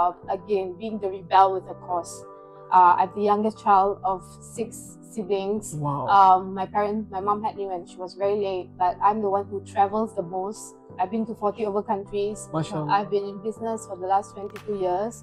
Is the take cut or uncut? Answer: uncut